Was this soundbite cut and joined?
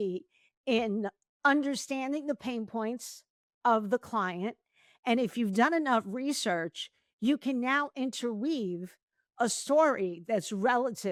no; 0 cuts

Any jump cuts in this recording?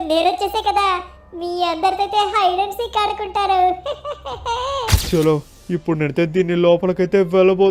yes; 1 cut; at 5.0 s

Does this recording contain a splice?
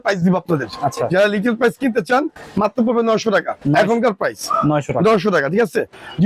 no; 0 cuts

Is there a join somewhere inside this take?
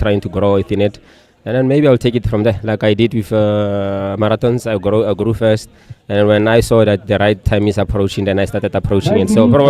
no; 0 cuts

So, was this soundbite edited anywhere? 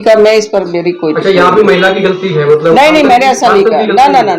no; 0 cuts

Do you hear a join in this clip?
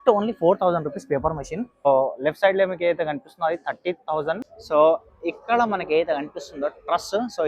yes; 2 cuts; at 1.9 s, 4.5 s

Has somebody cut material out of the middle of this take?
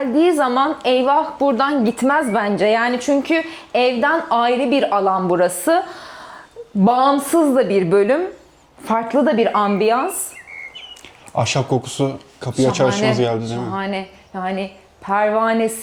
no; 0 cuts

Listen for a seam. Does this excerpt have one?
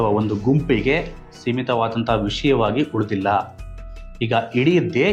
no; 0 cuts

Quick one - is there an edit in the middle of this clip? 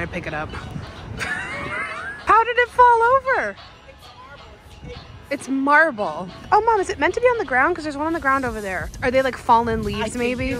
yes; 3 cuts; at 2.2 s, 6.3 s, 8.9 s

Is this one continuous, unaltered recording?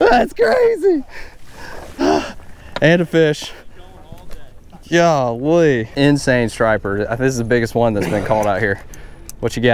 no; 1 cut; at 5.9 s

